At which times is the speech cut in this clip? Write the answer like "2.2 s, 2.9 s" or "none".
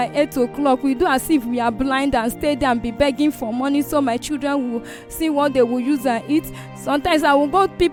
none